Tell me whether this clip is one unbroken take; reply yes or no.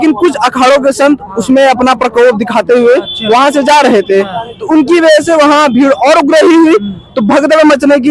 yes